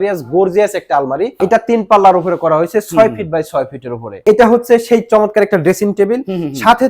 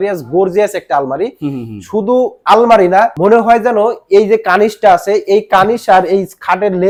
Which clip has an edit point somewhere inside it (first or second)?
first